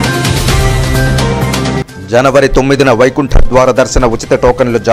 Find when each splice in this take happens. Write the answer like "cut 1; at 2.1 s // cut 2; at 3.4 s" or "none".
cut 1; at 1.8 s